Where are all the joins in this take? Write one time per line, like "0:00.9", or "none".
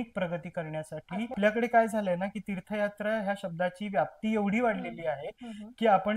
0:01.3

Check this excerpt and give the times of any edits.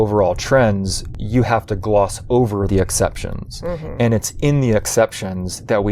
0:02.7

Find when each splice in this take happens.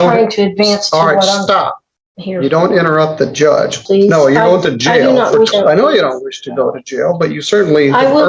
0:03.8
0:05.5

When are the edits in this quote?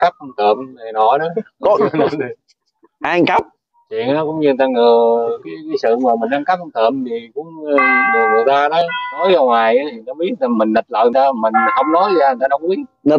0:09.2

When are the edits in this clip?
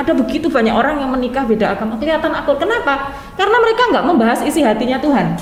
none

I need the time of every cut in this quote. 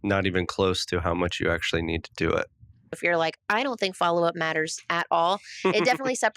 0:03.0

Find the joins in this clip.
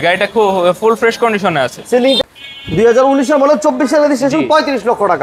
0:02.2

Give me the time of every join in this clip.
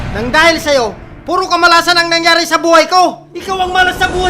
0:03.3

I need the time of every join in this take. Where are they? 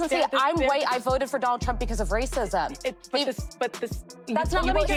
none

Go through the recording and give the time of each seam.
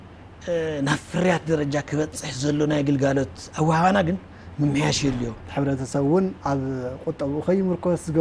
0:05.4

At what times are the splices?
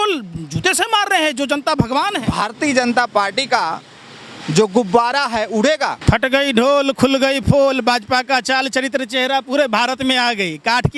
0:02.2
0:06.0

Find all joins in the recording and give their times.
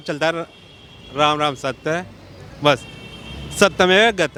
none

